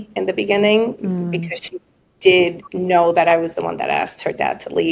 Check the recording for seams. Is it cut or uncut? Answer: uncut